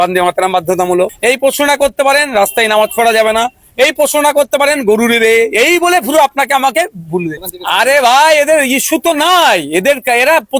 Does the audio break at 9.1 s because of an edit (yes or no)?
no